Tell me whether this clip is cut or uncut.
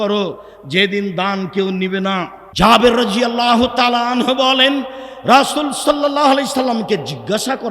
cut